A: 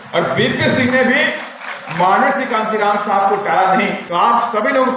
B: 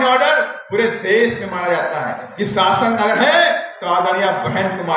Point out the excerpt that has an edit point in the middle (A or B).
A